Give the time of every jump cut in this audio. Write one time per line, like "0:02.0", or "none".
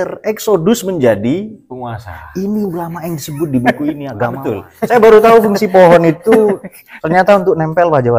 0:04.4